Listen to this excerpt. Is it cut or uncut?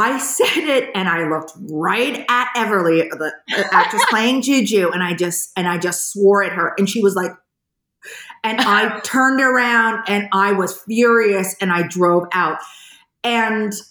uncut